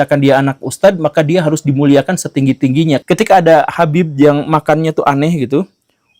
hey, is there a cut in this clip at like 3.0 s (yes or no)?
yes